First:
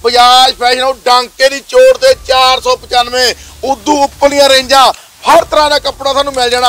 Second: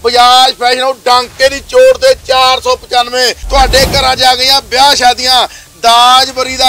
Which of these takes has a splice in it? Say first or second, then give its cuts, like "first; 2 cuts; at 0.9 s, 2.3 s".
second; 1 cut; at 3.4 s